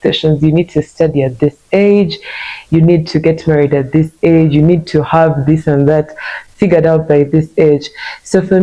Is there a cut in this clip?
no; 0 cuts

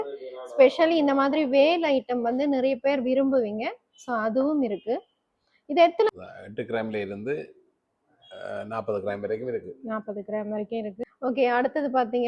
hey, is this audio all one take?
no; 2 cuts; at 6.1 s, 11.0 s

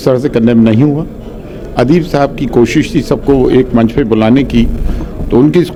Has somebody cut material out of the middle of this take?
no; 0 cuts

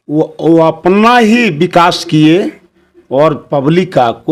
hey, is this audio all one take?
yes; 0 cuts

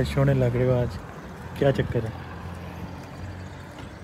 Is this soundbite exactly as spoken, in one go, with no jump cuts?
yes; 0 cuts

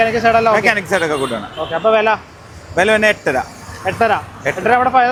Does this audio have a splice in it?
no; 0 cuts

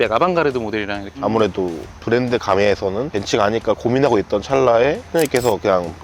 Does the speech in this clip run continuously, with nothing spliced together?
no; 3 cuts; at 1.1 s, 3.1 s, 5.0 s

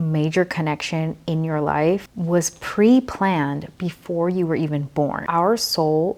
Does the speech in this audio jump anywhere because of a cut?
no; 0 cuts

